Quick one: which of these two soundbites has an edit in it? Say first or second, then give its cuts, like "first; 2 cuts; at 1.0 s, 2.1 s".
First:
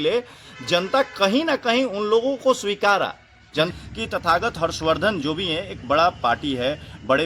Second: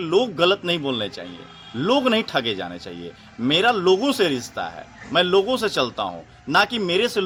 first; 1 cut; at 3.7 s